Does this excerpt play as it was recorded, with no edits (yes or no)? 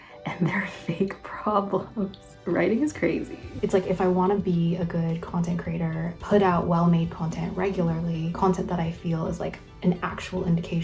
no